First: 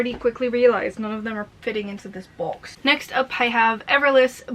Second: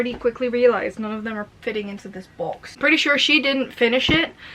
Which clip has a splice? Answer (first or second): second